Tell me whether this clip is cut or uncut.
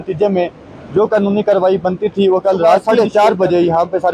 cut